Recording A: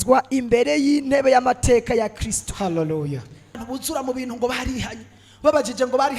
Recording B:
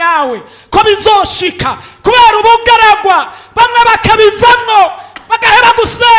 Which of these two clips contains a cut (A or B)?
A